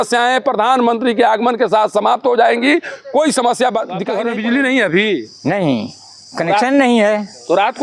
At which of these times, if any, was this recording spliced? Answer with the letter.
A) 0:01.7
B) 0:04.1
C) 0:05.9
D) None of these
B